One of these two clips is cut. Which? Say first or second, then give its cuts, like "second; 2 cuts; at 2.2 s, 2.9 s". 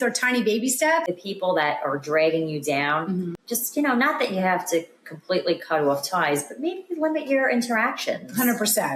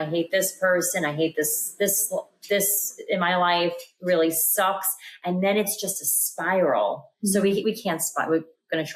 first; 1 cut; at 1.1 s